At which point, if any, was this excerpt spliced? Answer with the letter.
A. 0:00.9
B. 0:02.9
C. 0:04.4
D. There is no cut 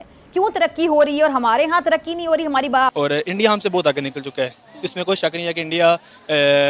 B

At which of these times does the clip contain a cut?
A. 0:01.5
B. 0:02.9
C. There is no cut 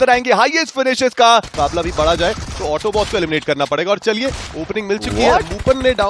A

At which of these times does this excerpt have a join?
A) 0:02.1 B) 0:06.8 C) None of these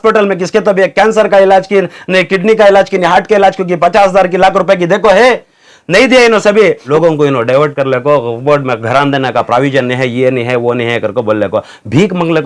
B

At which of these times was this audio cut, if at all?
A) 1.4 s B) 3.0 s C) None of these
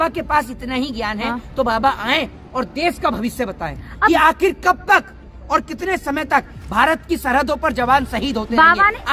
C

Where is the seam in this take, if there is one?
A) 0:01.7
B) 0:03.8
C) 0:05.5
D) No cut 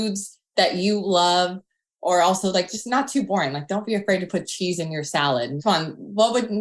C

